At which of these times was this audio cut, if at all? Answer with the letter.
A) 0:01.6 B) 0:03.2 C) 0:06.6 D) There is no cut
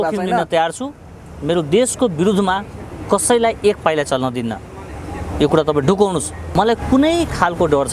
C